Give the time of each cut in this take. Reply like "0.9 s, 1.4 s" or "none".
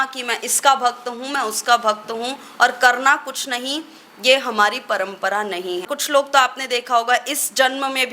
5.9 s